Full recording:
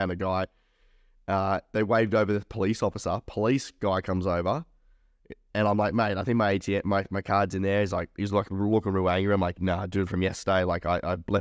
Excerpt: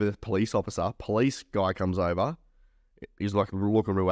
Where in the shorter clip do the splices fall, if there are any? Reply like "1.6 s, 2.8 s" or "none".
3.1 s